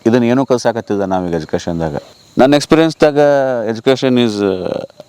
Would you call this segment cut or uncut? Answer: cut